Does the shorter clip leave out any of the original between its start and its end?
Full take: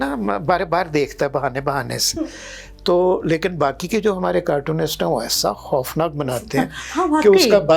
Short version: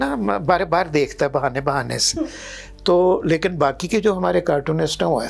no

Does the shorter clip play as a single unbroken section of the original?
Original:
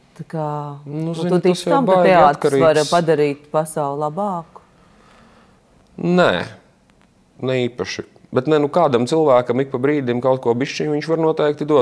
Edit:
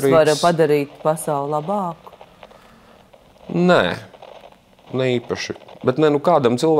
yes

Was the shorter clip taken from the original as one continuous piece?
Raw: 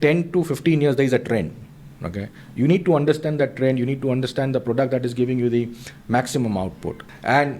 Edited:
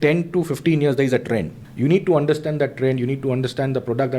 no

